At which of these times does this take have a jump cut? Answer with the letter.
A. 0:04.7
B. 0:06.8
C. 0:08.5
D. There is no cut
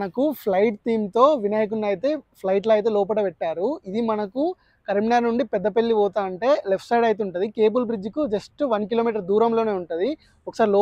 D